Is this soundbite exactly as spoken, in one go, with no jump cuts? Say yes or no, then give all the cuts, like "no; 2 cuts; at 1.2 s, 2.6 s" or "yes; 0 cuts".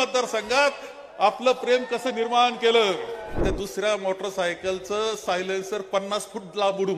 no; 1 cut; at 3.4 s